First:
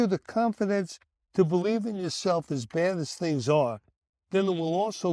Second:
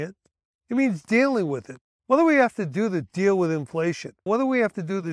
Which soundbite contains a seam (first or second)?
second